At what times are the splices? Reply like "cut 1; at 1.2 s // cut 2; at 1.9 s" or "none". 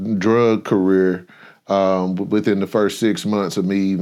none